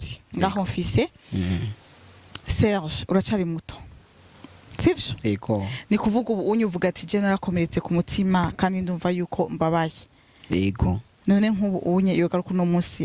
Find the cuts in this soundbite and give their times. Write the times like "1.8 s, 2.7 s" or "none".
none